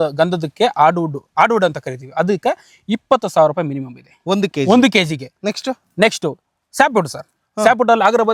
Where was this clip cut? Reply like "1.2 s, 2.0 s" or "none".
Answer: none